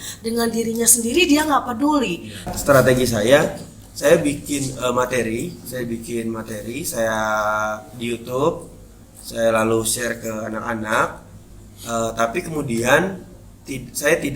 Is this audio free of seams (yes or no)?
no